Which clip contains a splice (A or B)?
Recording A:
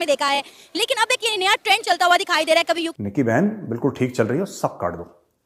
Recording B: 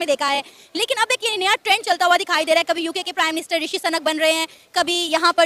A